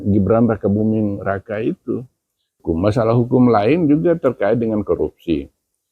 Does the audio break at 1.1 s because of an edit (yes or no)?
no